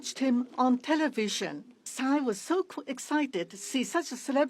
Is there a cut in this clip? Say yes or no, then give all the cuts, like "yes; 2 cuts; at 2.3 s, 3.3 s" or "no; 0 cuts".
yes; 1 cut; at 1.9 s